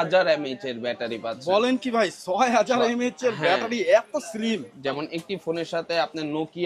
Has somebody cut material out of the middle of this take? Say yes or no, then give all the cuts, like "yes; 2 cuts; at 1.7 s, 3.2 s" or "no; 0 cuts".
yes; 1 cut; at 4.7 s